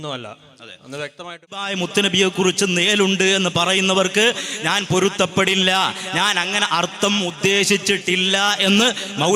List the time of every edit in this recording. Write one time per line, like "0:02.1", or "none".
0:01.6